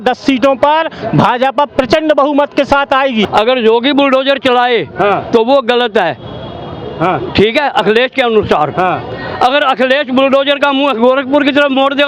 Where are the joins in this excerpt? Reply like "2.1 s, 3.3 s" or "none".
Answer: 3.3 s